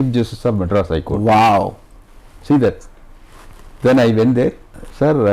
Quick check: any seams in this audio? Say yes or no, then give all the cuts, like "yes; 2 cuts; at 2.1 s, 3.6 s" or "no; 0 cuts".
no; 0 cuts